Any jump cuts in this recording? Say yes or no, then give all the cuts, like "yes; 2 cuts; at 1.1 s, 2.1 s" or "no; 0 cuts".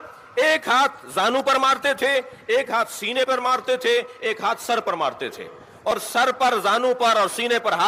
no; 0 cuts